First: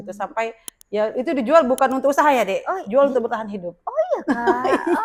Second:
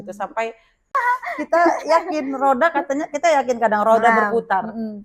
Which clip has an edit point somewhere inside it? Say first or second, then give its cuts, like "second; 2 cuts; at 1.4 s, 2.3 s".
second; 1 cut; at 0.9 s